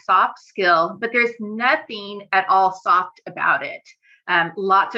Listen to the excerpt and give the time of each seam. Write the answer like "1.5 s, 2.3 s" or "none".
none